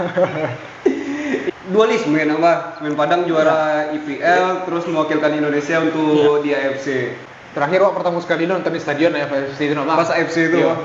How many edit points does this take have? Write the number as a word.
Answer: two